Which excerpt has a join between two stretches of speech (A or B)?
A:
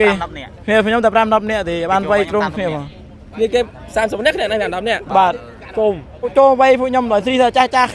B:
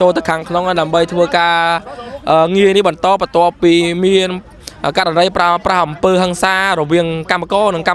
A